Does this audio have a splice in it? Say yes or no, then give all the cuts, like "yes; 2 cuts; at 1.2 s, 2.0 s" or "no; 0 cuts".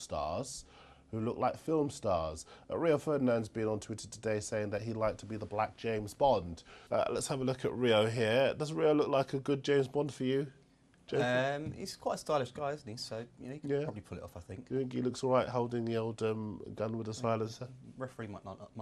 yes; 1 cut; at 14.5 s